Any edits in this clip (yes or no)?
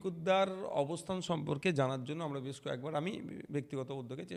no